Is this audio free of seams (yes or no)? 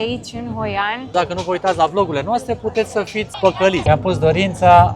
no